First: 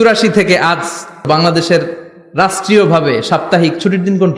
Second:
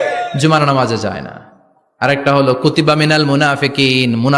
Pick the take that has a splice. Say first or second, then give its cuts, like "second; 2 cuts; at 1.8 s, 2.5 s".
first; 1 cut; at 1.2 s